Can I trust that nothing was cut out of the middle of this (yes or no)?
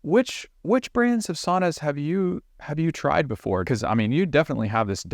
no